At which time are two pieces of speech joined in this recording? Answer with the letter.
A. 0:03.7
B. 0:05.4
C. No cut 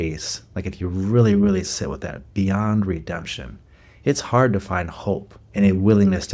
B